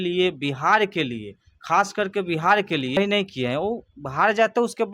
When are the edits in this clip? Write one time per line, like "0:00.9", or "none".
0:03.0